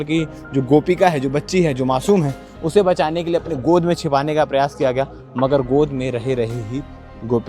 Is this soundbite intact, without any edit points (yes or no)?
yes